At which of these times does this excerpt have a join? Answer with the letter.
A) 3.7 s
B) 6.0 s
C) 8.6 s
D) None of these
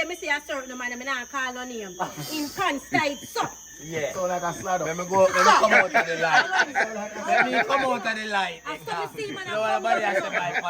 D